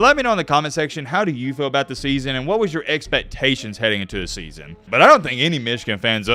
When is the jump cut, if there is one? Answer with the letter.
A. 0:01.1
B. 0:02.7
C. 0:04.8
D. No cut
C